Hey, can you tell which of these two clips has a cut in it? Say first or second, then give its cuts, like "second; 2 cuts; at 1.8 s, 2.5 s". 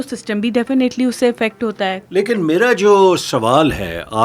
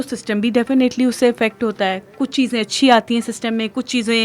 first; 1 cut; at 2.0 s